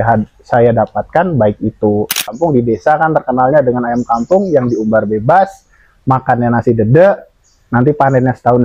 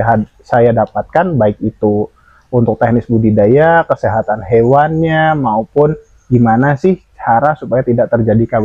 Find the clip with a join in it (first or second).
first